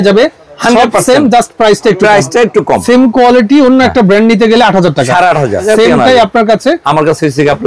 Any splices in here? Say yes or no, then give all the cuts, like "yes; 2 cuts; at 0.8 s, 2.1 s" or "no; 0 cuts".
yes; 2 cuts; at 2.8 s, 5.6 s